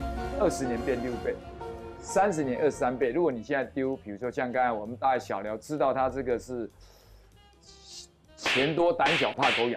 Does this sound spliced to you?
no; 0 cuts

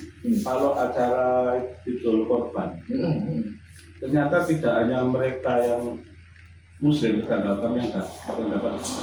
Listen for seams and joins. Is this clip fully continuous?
yes; 0 cuts

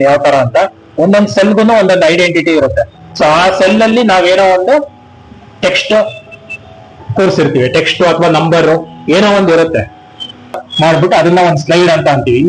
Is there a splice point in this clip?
yes; 1 cut; at 10.7 s

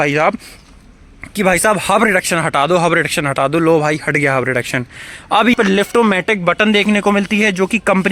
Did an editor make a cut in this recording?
yes; 1 cut; at 5.5 s

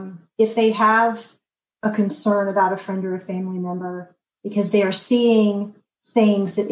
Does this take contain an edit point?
no; 0 cuts

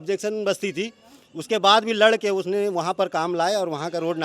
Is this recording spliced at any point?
no; 0 cuts

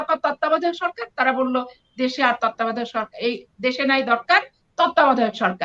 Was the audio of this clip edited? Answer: no; 0 cuts

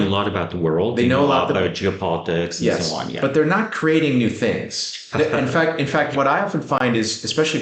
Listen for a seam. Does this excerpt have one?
no; 0 cuts

